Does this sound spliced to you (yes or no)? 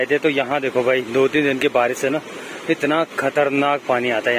no